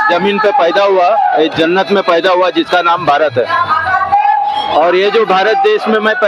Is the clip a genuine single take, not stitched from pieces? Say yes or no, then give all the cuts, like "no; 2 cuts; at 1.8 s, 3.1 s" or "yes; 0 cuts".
yes; 0 cuts